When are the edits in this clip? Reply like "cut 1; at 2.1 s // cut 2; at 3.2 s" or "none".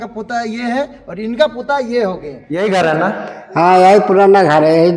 cut 1; at 2.4 s